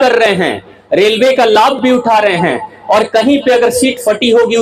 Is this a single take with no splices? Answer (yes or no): yes